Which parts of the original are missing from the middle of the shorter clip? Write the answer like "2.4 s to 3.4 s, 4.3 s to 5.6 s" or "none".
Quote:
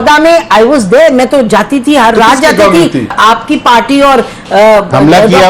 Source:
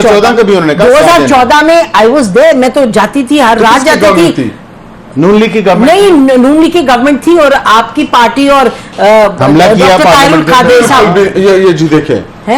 4.6 s to 7.6 s